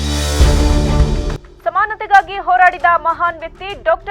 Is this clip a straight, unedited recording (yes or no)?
no